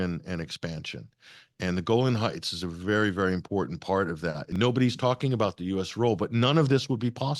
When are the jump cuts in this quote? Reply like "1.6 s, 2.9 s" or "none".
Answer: 4.4 s